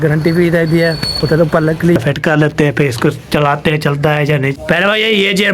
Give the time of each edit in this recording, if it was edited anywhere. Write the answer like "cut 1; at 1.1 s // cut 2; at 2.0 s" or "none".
cut 1; at 2.0 s // cut 2; at 4.5 s